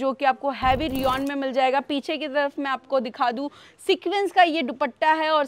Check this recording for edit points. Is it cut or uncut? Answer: uncut